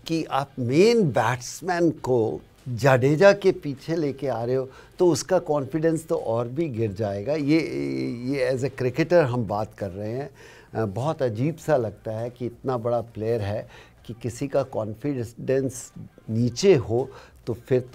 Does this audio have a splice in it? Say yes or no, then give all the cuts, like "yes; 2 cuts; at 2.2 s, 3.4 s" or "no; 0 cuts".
no; 0 cuts